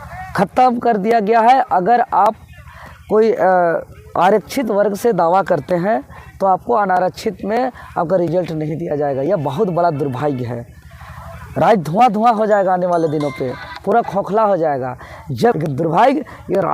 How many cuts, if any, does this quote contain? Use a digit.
1